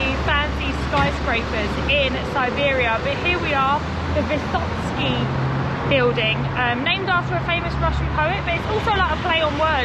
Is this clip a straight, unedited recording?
yes; 0 cuts

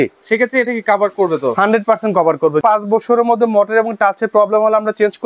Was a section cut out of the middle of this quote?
yes; 1 cut; at 2.6 s

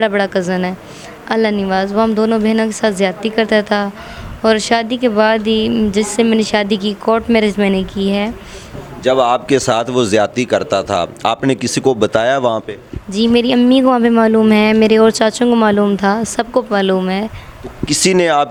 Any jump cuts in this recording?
no; 0 cuts

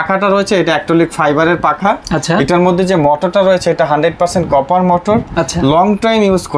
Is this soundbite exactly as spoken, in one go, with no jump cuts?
yes; 0 cuts

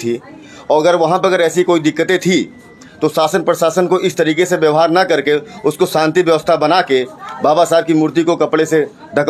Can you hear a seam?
no; 0 cuts

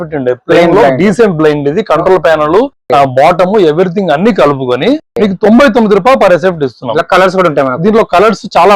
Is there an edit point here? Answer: no; 0 cuts

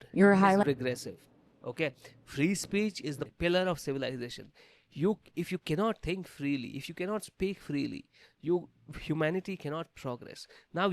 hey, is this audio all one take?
no; 1 cut; at 3.2 s

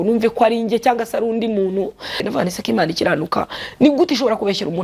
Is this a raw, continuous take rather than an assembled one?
no; 1 cut; at 2.3 s

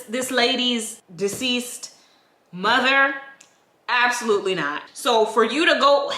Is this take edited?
yes; 2 cuts; at 1.0 s, 4.8 s

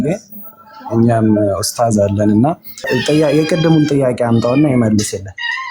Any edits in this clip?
yes; 1 cut; at 2.9 s

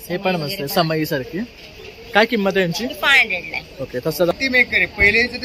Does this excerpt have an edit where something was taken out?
yes; 1 cut; at 4.3 s

